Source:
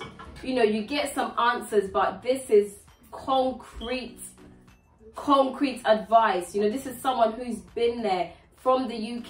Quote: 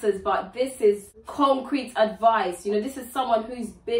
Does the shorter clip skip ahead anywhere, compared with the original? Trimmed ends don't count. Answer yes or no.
yes